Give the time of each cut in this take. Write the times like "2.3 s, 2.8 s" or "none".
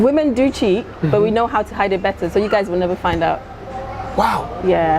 none